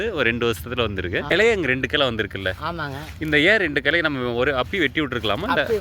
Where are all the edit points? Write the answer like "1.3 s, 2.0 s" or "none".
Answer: 1.3 s